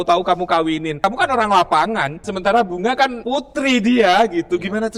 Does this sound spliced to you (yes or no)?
yes